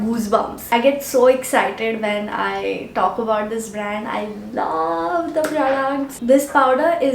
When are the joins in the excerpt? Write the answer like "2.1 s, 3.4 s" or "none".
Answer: 6.1 s